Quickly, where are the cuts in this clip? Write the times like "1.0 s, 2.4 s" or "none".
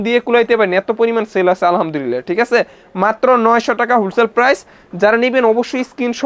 none